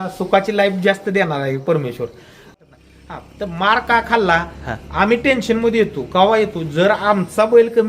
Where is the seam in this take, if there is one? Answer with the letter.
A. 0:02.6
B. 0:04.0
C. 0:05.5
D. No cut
A